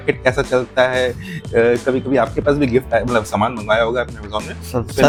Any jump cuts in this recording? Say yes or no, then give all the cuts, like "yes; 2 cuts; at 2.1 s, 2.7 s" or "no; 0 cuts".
no; 0 cuts